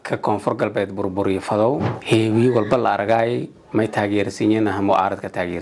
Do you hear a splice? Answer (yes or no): yes